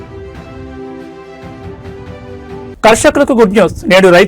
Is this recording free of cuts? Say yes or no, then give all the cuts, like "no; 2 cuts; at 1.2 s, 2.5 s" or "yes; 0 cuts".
yes; 0 cuts